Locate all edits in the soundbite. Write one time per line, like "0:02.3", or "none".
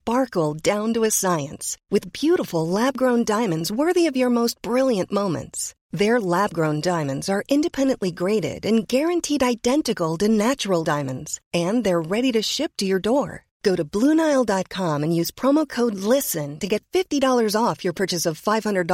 none

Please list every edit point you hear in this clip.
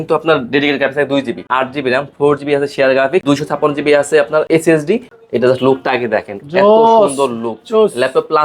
0:01.4
0:03.2
0:04.5
0:05.2

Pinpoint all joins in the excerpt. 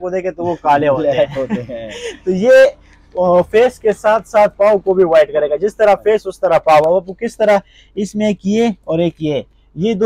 none

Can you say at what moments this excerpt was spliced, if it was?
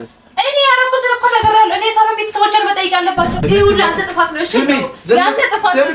0:03.4

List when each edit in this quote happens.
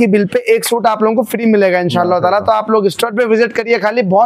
none

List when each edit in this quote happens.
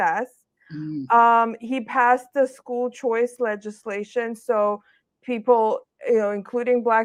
none

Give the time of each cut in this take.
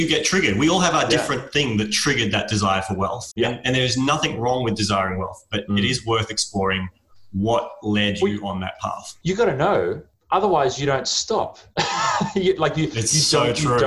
0:03.2

